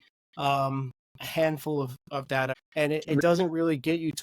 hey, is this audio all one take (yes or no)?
no